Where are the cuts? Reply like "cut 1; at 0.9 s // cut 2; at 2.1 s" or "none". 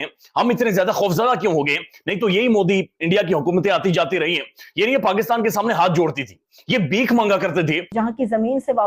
cut 1; at 7.9 s